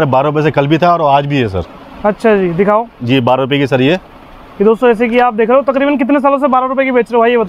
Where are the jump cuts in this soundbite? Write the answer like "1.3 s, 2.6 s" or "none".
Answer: none